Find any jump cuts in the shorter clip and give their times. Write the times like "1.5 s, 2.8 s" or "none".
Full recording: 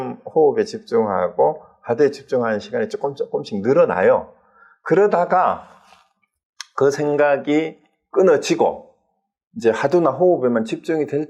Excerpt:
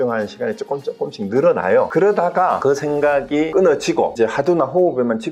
1.9 s, 2.6 s, 3.5 s, 4.1 s

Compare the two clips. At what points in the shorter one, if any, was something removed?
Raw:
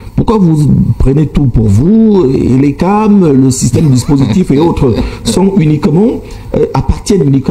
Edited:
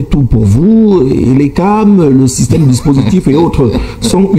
none

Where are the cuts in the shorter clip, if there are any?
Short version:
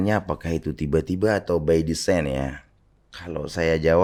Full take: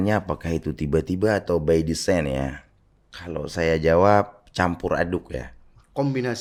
none

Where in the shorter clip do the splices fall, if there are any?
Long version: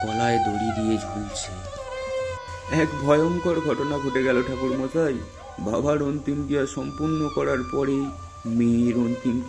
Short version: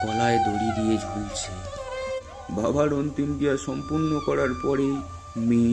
2.2 s

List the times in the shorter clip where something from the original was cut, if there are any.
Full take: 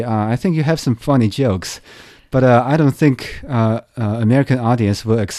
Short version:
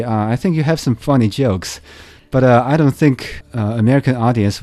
3.4 s

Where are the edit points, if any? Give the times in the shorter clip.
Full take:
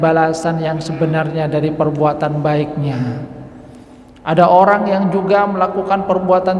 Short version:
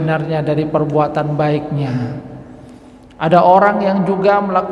none

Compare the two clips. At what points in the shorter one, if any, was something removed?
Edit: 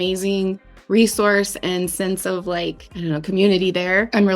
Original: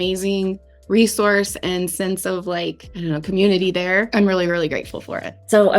none

